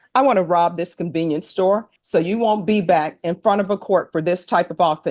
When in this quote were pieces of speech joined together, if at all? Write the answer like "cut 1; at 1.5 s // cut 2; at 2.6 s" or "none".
cut 1; at 2.0 s

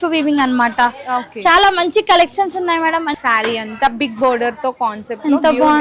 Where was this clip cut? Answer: cut 1; at 3.1 s

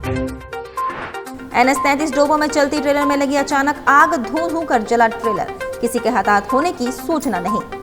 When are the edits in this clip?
cut 1; at 1.4 s

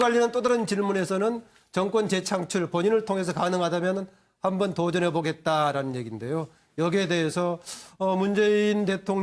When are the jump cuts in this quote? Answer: none

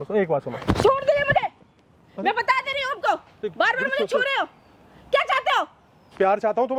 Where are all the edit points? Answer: none

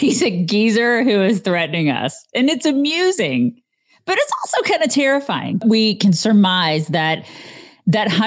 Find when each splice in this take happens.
cut 1; at 5.6 s

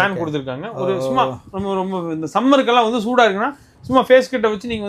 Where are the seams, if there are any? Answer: none

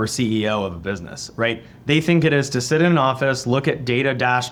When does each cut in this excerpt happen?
none

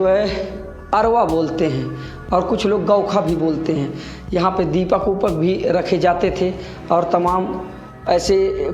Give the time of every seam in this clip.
none

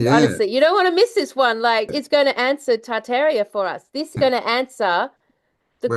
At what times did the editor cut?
cut 1; at 1.9 s // cut 2; at 4.1 s

